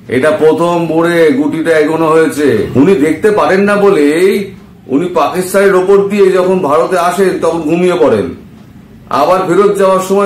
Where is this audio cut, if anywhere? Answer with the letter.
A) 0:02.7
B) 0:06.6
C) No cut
A